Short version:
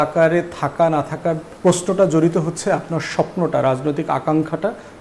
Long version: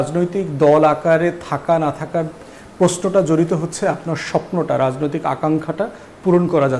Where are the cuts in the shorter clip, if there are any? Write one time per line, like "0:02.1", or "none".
0:01.5